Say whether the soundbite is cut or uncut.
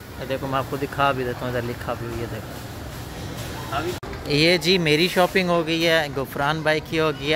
cut